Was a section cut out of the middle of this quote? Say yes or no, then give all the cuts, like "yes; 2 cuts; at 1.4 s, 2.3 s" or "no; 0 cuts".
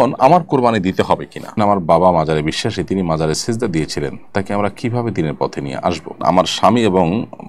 yes; 2 cuts; at 1.6 s, 6.2 s